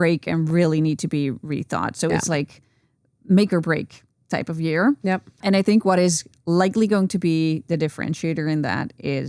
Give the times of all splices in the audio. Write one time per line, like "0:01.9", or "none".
0:05.4